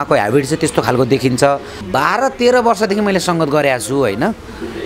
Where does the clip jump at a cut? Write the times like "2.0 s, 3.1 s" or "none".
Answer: 1.8 s

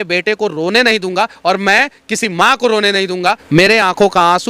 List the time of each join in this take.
3.4 s

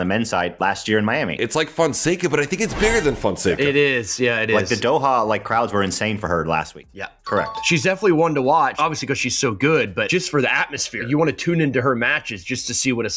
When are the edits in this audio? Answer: 6.9 s

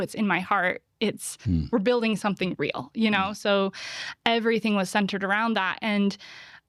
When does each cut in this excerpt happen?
none

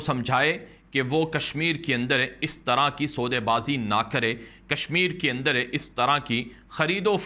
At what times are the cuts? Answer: none

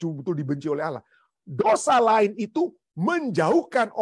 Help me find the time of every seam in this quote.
2.9 s

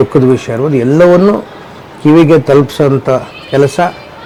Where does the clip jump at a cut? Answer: none

